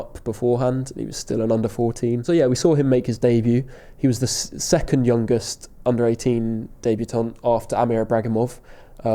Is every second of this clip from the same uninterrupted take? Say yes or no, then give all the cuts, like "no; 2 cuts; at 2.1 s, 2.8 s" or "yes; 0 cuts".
no; 1 cut; at 2.2 s